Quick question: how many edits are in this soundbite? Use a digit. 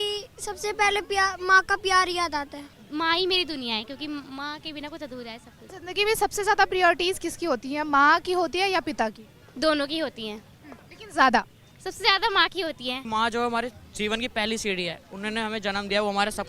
3